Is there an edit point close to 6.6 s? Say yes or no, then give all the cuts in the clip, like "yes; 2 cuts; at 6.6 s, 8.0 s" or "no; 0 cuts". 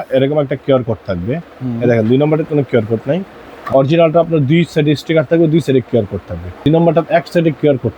yes; 2 cuts; at 3.7 s, 6.6 s